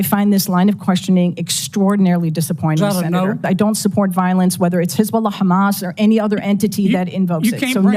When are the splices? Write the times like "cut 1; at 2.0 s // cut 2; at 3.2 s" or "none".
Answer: cut 1; at 3.4 s